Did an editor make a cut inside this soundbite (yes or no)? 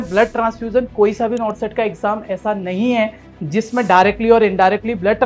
no